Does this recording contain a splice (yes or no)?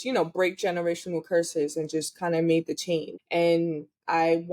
yes